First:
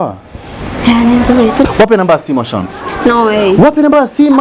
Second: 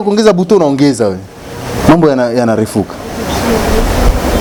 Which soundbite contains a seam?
first; 1 cut; at 1.6 s

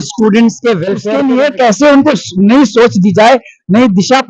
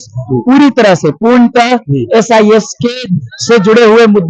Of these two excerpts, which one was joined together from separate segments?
first; 1 cut; at 0.9 s

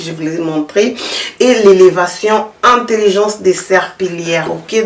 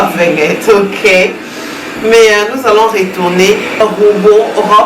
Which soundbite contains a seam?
second; 1 cut; at 3.8 s

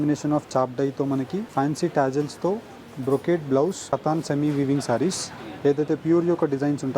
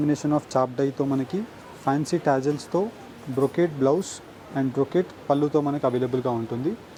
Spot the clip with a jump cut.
first; 2 cuts; at 1.5 s, 3.9 s

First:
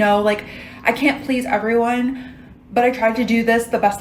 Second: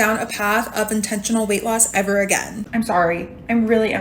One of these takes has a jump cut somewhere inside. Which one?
second; 1 cut; at 2.6 s

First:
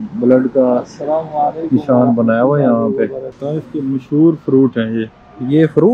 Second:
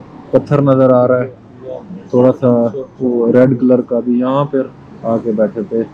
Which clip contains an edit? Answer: first; 1 cut; at 3.3 s

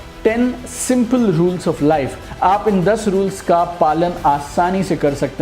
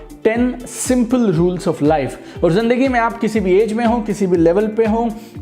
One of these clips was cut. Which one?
first; 1 cut; at 2.2 s

